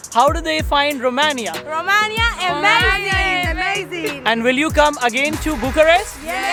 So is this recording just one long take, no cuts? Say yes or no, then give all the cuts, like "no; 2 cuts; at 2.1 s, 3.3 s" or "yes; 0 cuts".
yes; 0 cuts